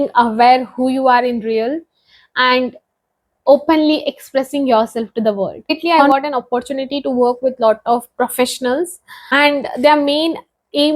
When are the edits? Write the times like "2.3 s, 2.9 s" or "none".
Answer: 5.9 s